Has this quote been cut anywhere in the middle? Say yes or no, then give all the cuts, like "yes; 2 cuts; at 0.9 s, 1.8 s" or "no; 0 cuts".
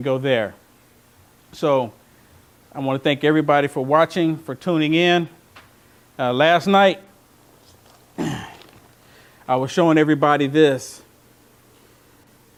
no; 0 cuts